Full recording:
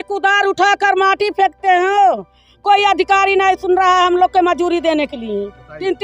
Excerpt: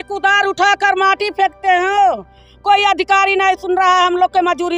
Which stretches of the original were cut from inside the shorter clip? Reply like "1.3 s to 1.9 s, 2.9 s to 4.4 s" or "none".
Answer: none

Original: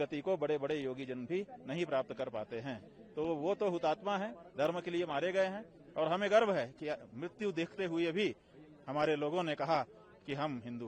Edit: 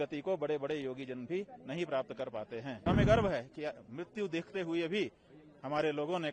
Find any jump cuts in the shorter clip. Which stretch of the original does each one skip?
2.8 s to 6.1 s

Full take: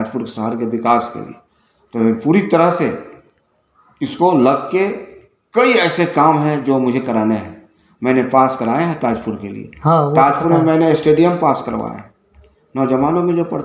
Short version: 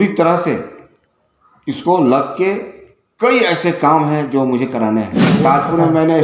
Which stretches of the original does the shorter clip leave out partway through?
7.7 s to 10.1 s

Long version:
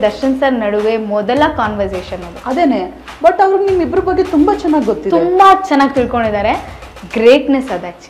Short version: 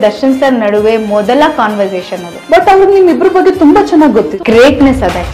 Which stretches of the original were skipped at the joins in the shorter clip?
2.3 s to 3.0 s, 5.0 s to 7.0 s

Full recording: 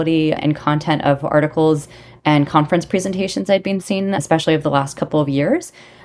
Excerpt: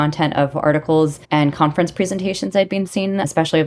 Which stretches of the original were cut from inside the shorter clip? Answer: 1.9 s to 2.1 s

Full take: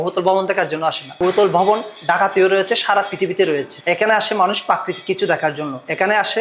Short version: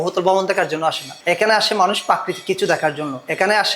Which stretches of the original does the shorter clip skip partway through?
1.1 s to 3.7 s

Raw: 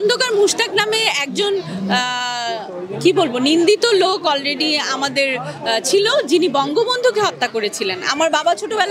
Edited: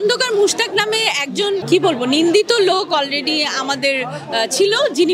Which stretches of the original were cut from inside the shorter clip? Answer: 1.6 s to 3.0 s

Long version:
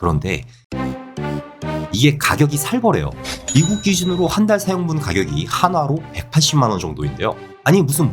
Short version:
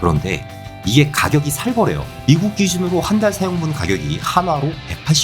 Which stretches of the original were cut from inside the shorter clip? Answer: 0.7 s to 1.8 s, 3.2 s to 3.4 s

